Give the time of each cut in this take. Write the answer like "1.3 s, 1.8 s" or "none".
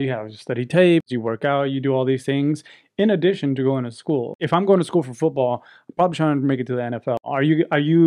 1.1 s, 4.4 s